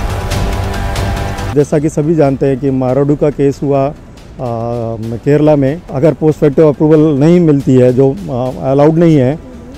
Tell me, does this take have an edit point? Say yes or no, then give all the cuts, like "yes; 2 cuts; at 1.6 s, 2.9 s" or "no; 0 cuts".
yes; 2 cuts; at 1.5 s, 5.9 s